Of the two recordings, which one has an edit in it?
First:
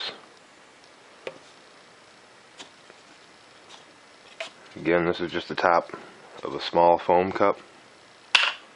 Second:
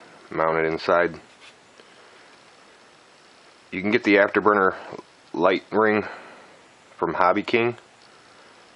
second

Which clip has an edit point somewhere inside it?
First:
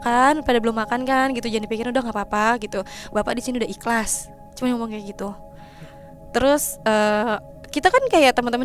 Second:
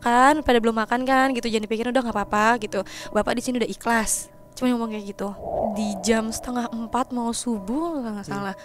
second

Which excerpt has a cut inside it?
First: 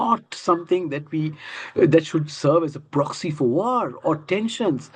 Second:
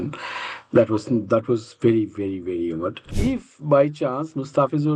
second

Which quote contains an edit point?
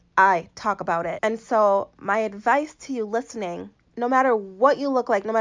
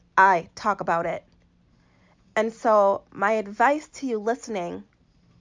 first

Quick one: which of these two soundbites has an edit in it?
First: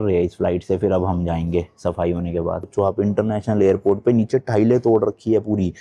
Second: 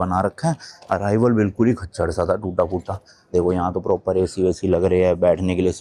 first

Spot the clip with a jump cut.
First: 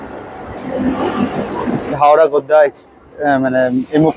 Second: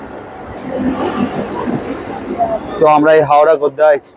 first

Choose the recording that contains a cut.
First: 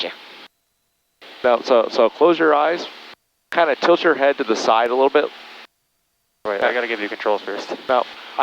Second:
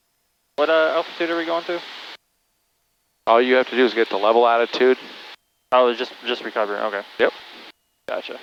first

